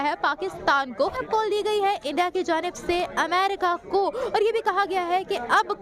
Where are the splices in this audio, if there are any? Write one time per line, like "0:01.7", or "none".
0:01.2